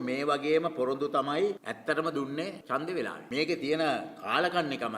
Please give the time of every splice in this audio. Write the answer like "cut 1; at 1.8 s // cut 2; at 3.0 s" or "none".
cut 1; at 3.2 s